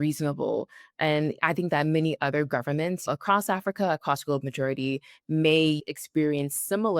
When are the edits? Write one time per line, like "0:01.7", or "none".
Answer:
0:03.0
0:05.8